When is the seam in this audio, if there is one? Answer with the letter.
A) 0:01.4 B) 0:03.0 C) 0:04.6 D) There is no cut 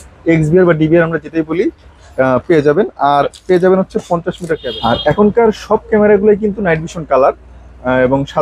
C